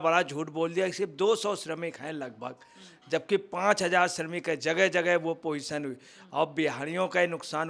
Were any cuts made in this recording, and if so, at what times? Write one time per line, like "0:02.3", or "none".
none